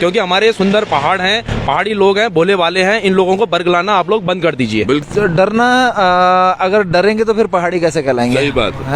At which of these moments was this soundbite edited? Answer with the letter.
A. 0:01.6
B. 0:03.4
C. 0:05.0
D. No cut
C